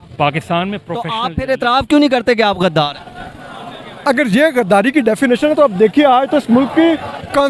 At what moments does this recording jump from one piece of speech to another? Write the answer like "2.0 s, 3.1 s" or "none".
1.2 s